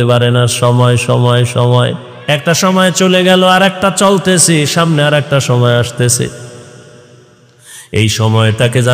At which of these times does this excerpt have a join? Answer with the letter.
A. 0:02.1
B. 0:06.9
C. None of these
A